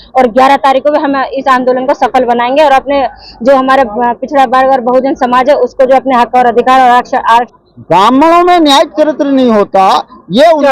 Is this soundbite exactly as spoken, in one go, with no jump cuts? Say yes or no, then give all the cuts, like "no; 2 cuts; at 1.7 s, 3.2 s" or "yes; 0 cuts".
no; 1 cut; at 7.5 s